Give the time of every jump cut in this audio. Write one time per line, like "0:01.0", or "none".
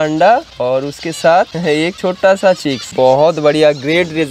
none

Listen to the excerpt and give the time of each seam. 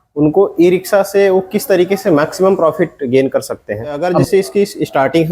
0:04.0

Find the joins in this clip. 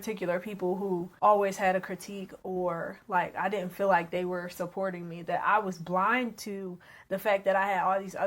0:01.1

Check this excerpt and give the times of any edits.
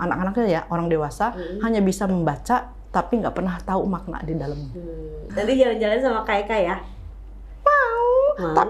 0:05.2

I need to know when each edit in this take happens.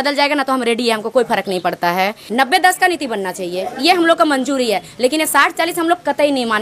0:02.2

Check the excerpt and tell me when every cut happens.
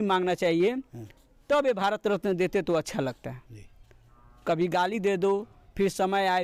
none

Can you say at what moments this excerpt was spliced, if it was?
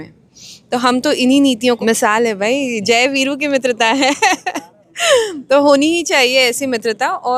0:01.8

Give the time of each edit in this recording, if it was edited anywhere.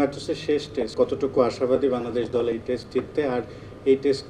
0:00.9

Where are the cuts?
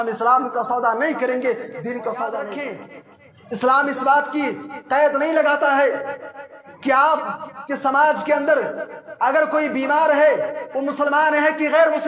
0:02.8

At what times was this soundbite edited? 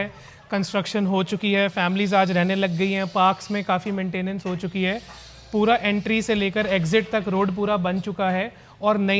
none

